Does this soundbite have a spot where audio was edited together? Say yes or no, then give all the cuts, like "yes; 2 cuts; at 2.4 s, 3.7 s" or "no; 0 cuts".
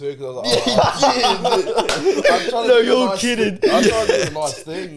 no; 0 cuts